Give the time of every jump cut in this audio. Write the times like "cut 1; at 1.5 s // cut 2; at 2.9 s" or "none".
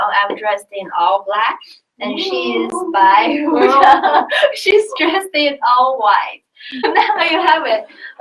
cut 1; at 6.8 s

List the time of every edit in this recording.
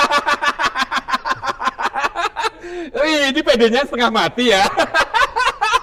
none

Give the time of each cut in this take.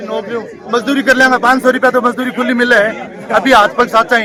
none

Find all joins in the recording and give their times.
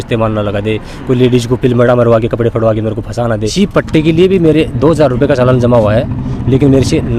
cut 1; at 3.5 s

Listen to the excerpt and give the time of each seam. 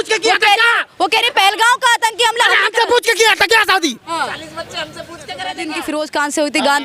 cut 1; at 5.6 s

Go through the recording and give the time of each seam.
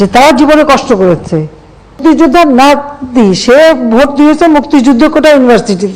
cut 1; at 2.0 s

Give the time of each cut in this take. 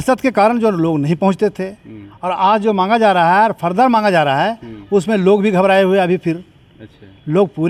none

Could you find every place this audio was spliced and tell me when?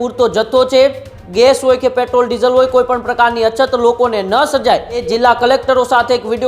cut 1; at 1.2 s // cut 2; at 5.0 s

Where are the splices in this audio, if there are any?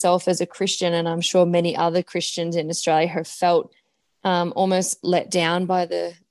none

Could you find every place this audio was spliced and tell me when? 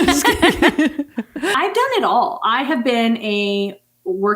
cut 1; at 1.5 s

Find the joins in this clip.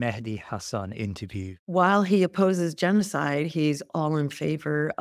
cut 1; at 1.6 s

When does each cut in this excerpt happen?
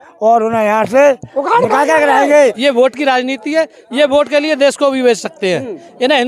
cut 1; at 2.6 s

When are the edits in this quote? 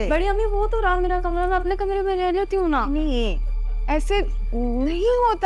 none

